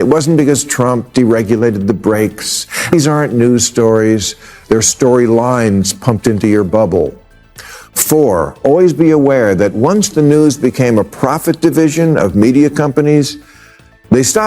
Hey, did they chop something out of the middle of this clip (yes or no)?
yes